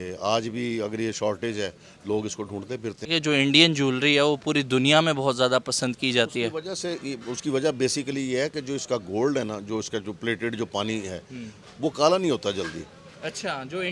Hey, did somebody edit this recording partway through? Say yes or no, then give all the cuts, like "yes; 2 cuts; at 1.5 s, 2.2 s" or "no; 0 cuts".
yes; 1 cut; at 3.1 s